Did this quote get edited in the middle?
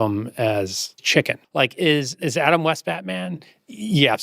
yes; 2 cuts; at 1.1 s, 2.1 s

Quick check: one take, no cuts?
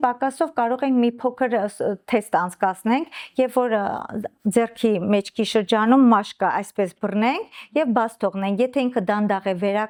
yes; 0 cuts

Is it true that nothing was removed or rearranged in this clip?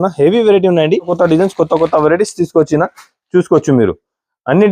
no; 1 cut; at 1.1 s

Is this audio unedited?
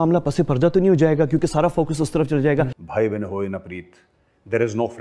no; 1 cut; at 2.8 s

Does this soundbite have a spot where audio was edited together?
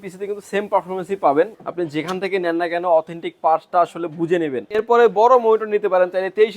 yes; 2 cuts; at 1.5 s, 4.8 s

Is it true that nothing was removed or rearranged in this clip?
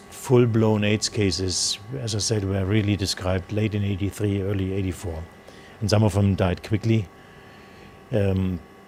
yes; 0 cuts

